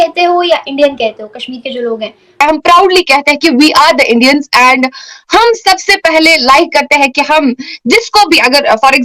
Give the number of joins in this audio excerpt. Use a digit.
1